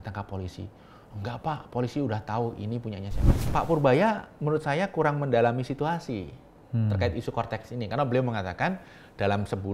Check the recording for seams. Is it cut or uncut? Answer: cut